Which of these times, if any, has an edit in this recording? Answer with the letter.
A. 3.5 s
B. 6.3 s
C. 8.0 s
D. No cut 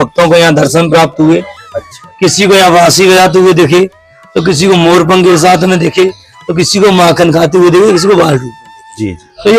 D